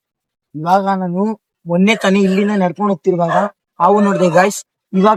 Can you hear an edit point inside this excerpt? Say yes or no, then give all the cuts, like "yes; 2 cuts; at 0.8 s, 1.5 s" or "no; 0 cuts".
no; 0 cuts